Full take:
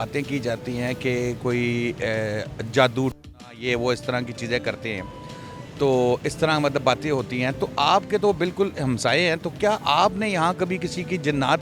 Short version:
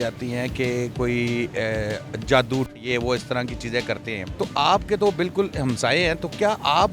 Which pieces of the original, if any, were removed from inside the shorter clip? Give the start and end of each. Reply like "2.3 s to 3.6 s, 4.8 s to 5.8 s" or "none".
3.2 s to 3.5 s, 5.1 s to 7.6 s